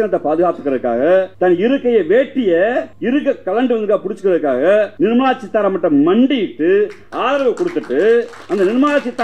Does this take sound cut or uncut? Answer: cut